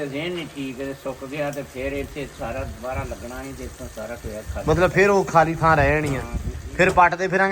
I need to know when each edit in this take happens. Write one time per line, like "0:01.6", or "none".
none